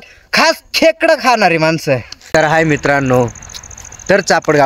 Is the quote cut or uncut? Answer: cut